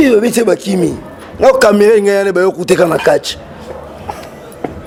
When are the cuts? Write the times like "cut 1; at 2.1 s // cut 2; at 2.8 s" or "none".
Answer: none